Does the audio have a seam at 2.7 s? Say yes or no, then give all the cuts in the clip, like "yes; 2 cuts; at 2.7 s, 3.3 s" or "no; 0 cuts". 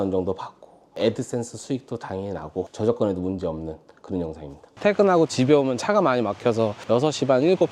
yes; 2 cuts; at 2.7 s, 4.8 s